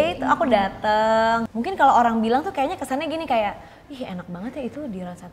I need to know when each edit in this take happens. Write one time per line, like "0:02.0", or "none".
0:01.5

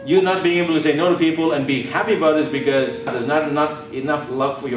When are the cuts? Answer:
0:03.1

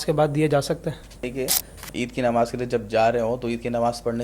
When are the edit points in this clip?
0:01.2

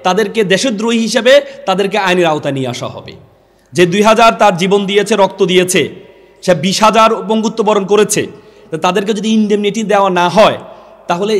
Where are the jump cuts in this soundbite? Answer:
none

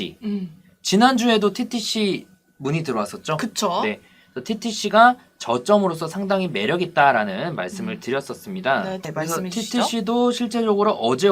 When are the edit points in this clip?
0:09.1

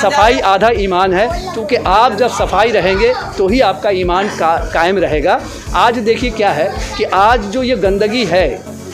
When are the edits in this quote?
none

